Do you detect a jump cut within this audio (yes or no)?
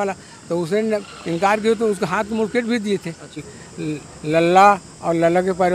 yes